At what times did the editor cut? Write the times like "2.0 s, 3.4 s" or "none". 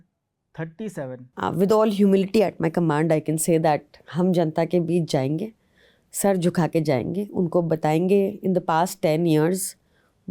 1.2 s